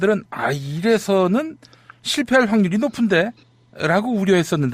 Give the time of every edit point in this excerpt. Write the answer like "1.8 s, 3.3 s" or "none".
2.9 s